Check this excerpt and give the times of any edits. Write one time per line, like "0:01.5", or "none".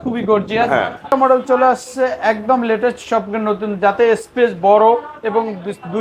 0:01.1